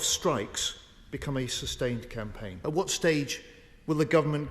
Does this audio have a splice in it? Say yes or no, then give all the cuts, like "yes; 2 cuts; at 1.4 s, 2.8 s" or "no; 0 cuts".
yes; 1 cut; at 2.4 s